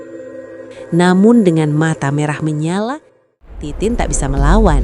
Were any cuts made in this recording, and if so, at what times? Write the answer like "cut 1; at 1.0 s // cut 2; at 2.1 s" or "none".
cut 1; at 3.7 s